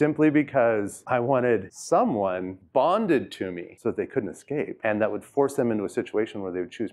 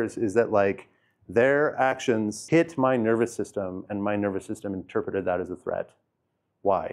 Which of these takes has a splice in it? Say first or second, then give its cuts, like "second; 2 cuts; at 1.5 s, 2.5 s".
first; 1 cut; at 1.0 s